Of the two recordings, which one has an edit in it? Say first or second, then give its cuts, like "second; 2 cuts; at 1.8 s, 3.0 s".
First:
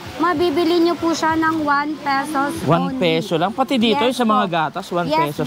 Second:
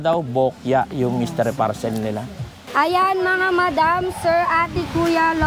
second; 1 cut; at 2.6 s